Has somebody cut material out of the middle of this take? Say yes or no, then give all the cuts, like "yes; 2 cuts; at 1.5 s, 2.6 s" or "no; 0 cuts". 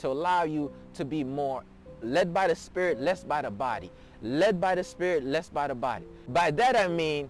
yes; 1 cut; at 6.1 s